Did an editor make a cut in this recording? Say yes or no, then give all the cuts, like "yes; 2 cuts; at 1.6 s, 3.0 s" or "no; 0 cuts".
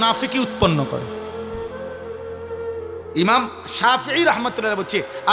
yes; 2 cuts; at 1.0 s, 3.1 s